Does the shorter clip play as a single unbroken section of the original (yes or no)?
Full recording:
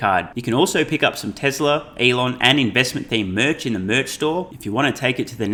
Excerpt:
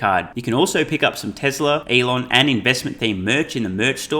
no